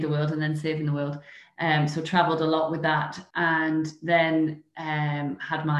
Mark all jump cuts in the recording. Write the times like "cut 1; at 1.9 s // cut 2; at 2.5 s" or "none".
cut 1; at 3.2 s

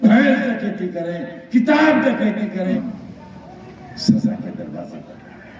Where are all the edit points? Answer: cut 1; at 2.7 s

